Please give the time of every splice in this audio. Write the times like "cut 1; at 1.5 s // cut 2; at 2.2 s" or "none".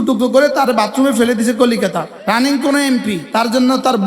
cut 1; at 2.1 s // cut 2; at 3.2 s